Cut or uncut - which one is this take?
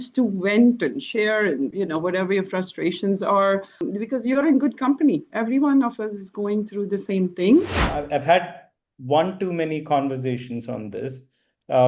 cut